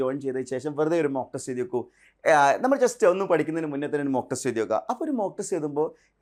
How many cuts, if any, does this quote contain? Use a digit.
0